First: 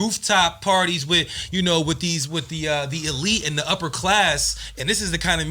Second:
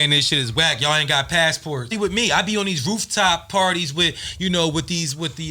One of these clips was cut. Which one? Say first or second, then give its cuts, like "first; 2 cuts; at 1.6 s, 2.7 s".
second; 1 cut; at 1.9 s